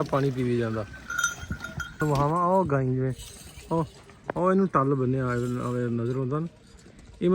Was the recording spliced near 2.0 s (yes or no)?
yes